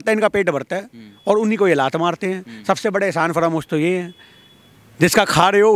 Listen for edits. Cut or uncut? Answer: uncut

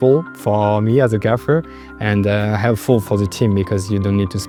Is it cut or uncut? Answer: uncut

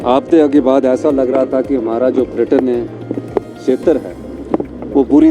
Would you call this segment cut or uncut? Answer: uncut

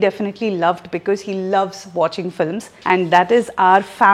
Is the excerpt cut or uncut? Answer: cut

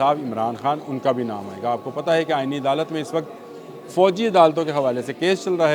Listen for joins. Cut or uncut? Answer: uncut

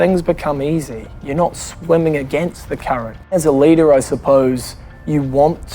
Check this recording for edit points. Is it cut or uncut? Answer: cut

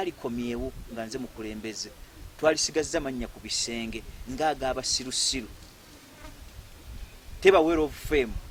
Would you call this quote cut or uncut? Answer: uncut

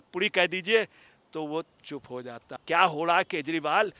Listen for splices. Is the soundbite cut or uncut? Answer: cut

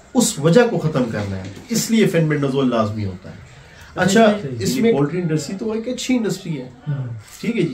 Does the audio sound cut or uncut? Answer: cut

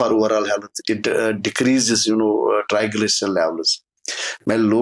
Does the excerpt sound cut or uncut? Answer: uncut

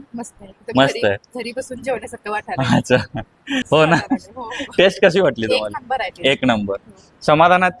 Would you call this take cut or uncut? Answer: cut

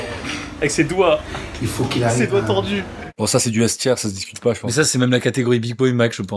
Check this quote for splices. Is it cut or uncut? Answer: uncut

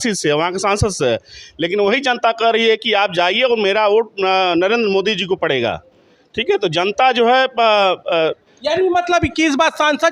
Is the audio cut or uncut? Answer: uncut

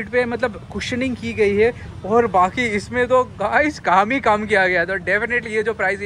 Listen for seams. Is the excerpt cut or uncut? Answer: uncut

